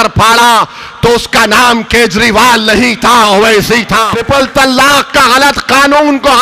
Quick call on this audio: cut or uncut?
cut